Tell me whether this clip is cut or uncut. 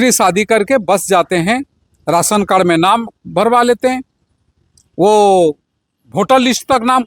uncut